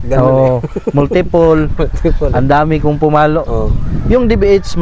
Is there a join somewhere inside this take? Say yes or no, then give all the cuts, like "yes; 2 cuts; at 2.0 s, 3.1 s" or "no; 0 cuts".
no; 0 cuts